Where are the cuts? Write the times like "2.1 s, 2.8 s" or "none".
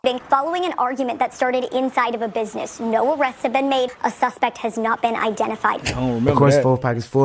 6.2 s